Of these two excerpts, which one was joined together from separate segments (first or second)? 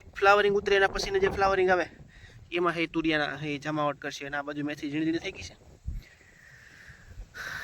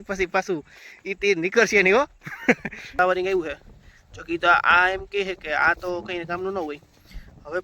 second